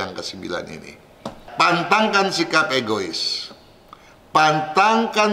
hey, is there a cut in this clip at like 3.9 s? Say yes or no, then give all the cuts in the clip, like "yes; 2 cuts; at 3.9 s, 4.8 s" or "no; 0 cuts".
no; 1 cut; at 1.4 s